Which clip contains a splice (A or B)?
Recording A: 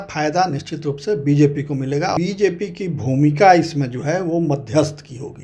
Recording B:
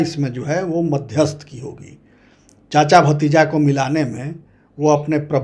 A